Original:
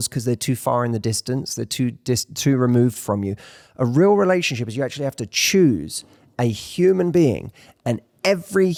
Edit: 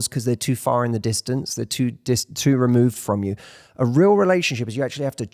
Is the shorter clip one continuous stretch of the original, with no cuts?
yes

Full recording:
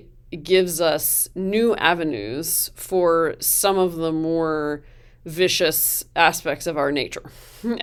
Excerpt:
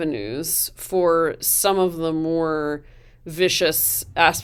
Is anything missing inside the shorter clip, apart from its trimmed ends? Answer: no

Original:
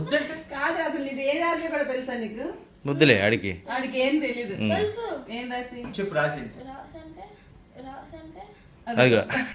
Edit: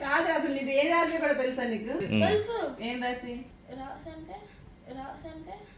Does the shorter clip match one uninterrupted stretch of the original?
no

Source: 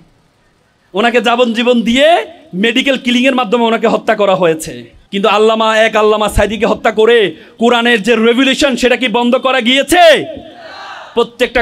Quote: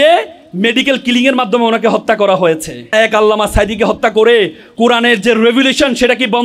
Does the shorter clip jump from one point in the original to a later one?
yes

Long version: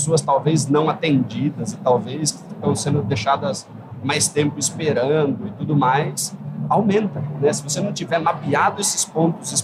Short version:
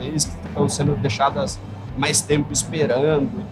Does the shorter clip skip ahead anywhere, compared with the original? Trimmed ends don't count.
no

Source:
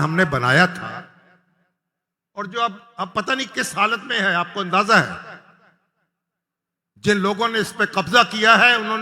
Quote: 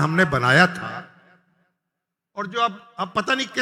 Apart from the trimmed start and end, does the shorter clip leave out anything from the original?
no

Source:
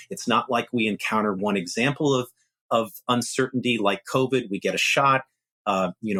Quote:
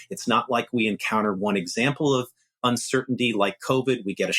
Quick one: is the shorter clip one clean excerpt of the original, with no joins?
no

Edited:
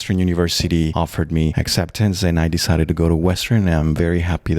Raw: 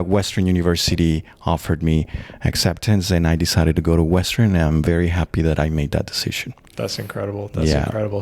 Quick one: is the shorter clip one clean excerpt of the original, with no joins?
no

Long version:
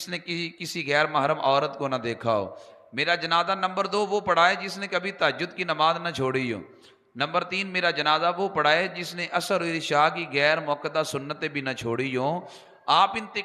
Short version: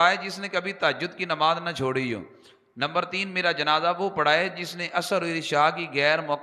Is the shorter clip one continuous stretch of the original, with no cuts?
yes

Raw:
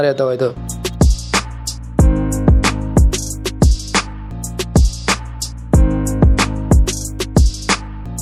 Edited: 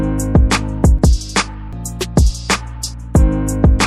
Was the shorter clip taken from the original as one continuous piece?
no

